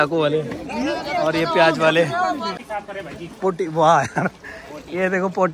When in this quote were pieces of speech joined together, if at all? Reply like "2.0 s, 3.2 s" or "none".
2.6 s